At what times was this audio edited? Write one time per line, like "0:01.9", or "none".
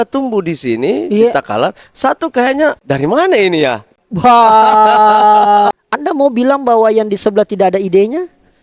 0:02.8
0:05.7